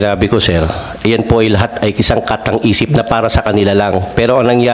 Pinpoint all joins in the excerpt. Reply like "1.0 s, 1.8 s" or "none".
none